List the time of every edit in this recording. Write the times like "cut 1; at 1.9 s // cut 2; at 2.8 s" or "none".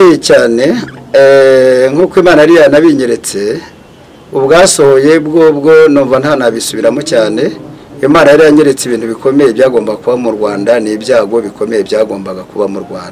none